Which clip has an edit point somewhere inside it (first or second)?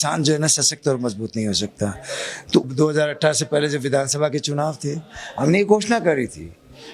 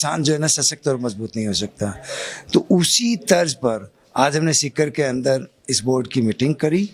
first